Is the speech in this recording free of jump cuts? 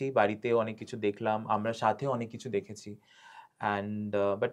yes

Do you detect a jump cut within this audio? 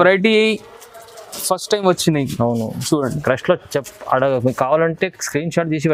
no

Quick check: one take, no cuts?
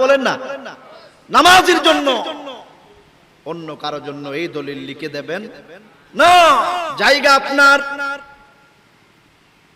no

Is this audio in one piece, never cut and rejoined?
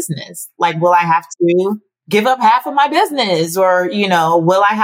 no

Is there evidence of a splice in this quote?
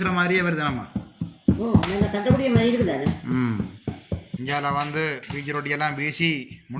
yes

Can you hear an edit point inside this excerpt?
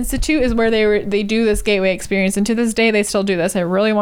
no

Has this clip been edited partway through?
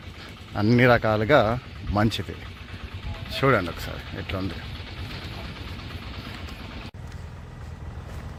no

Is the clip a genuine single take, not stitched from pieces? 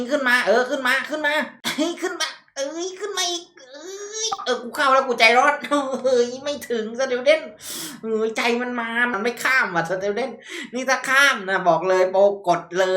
no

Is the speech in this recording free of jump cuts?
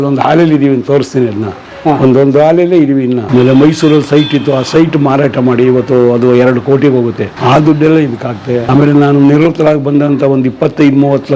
no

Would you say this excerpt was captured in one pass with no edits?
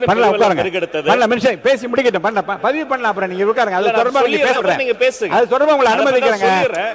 yes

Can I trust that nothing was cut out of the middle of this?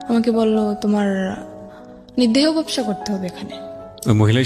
yes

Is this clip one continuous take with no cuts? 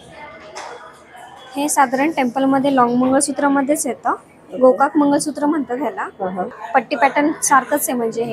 no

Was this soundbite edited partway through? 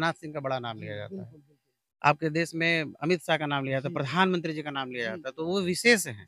no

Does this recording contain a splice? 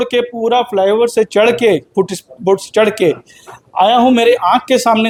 no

